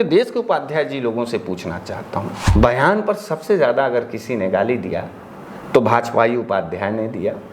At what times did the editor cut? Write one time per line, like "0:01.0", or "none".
0:02.4

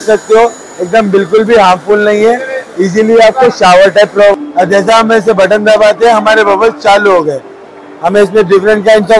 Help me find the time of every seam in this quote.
0:04.4

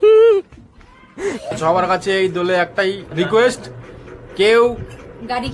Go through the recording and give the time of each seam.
0:01.4

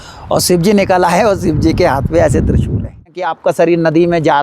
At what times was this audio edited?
0:03.4

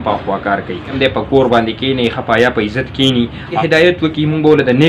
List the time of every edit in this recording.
0:00.9
0:03.5

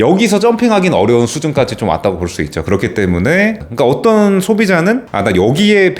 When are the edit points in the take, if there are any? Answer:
0:03.6
0:05.1

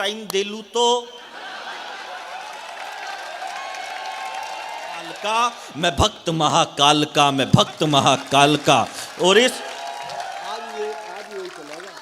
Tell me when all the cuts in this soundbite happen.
0:05.1

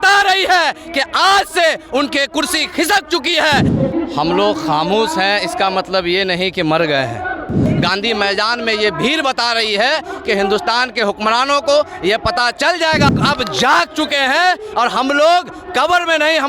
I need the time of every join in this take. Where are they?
0:03.7
0:07.7
0:13.2

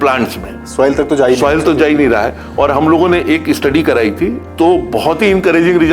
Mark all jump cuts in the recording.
0:04.4

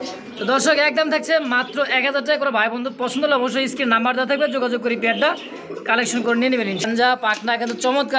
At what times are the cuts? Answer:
0:06.8

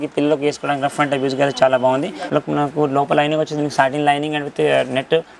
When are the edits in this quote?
0:02.2

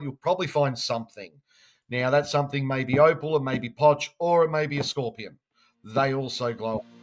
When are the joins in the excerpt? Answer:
none

